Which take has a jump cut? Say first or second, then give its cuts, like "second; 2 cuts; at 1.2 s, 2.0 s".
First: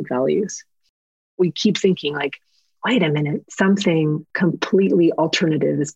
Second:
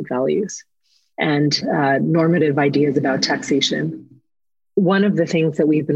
first; 2 cuts; at 1.2 s, 4.3 s